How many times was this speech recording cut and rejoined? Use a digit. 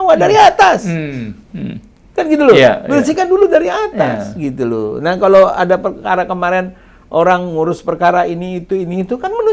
0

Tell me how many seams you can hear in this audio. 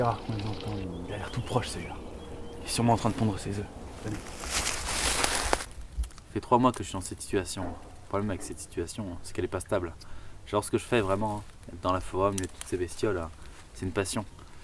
1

